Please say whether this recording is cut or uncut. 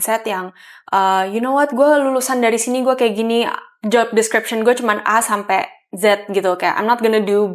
uncut